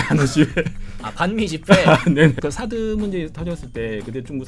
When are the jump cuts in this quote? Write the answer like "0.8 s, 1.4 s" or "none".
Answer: 2.4 s